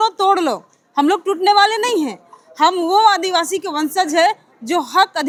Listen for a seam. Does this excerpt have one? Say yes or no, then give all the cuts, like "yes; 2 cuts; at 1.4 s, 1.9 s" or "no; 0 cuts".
no; 0 cuts